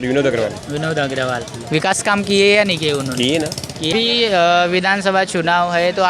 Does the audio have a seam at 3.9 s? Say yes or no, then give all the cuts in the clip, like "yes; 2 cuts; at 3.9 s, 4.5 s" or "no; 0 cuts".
yes; 1 cut; at 3.9 s